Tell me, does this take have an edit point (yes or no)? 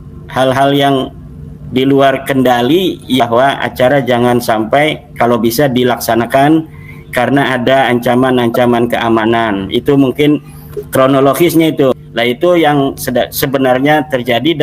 yes